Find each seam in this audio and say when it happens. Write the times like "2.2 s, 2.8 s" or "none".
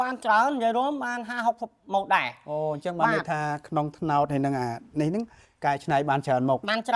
none